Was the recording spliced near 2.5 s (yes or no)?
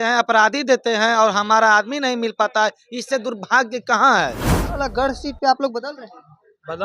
no